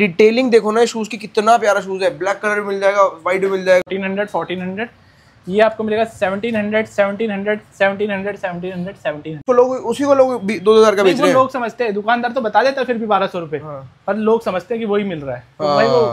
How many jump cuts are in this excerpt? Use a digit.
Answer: 2